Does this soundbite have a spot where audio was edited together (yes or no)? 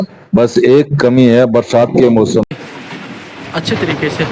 yes